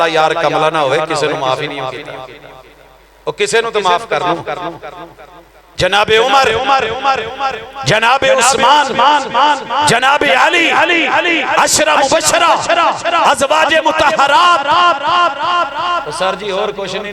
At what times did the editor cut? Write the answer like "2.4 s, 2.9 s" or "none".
none